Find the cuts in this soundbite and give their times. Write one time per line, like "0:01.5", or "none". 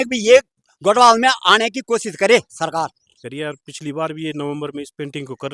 0:03.0